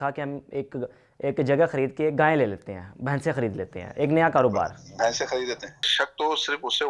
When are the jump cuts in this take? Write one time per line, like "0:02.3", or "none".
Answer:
0:05.9